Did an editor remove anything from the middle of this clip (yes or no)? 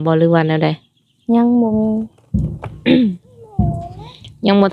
no